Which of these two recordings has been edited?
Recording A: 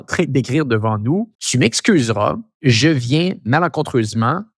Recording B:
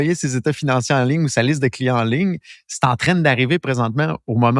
A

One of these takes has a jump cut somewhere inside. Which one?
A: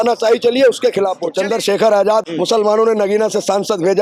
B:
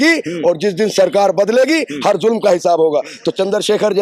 A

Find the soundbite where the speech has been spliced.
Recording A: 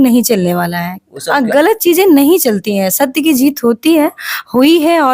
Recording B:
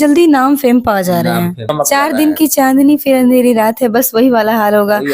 B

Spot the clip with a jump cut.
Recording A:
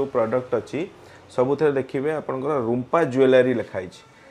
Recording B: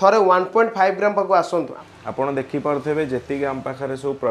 B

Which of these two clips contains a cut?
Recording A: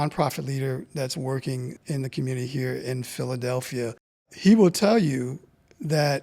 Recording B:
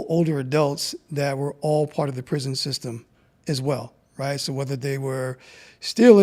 A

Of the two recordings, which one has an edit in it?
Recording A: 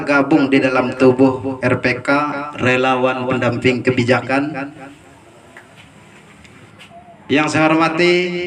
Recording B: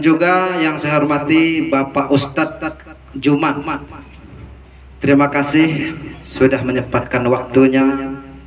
A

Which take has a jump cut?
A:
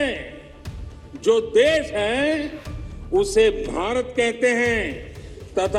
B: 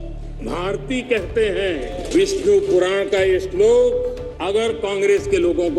B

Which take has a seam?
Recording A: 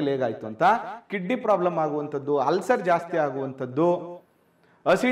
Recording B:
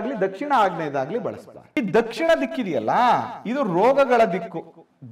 B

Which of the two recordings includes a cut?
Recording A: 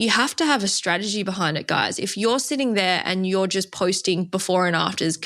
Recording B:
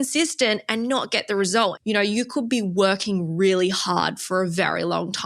B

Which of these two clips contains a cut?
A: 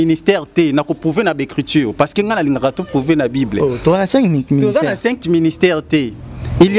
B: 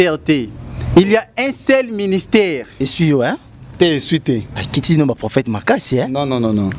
B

